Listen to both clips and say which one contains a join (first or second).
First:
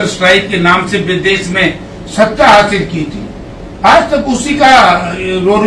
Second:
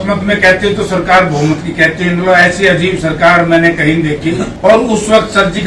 second